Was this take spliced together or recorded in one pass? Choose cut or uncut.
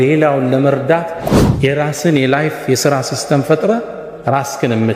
cut